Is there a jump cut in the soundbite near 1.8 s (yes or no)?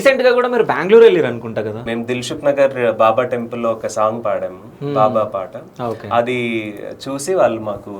yes